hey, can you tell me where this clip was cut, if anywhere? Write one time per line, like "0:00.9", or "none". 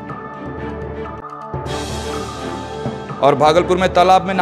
0:01.3
0:02.7